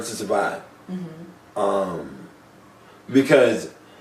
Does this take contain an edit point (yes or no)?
yes